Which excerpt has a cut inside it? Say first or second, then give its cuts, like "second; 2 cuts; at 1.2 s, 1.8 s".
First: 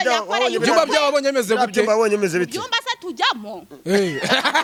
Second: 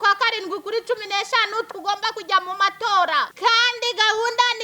second; 1 cut; at 3.3 s